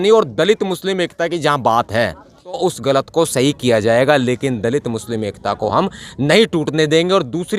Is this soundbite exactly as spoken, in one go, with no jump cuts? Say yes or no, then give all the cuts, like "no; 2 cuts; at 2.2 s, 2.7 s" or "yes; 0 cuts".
no; 1 cut; at 2.6 s